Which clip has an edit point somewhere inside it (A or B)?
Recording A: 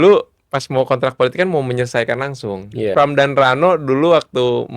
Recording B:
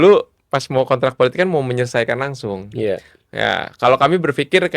A